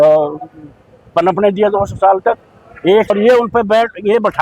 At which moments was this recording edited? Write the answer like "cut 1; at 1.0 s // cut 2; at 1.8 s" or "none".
cut 1; at 3.1 s